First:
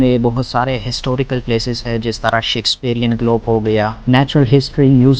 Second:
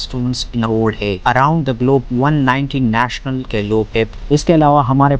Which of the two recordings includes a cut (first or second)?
second